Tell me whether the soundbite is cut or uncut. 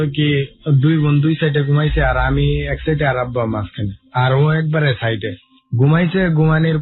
uncut